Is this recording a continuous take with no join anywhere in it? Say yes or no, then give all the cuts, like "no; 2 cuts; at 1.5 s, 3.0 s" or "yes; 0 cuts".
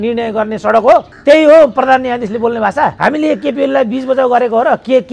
no; 2 cuts; at 1.1 s, 2.9 s